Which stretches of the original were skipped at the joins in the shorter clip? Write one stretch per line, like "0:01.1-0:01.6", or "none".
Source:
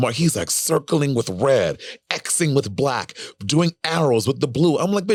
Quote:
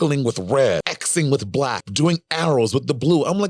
0:01.9-0:02.2
0:03.1-0:03.4